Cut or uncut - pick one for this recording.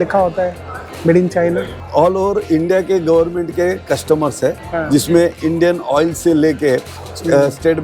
cut